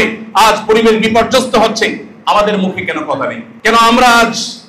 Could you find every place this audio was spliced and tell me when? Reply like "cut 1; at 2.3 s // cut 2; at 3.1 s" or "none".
cut 1; at 3.5 s